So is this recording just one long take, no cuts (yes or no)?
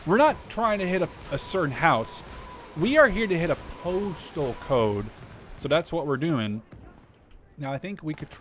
yes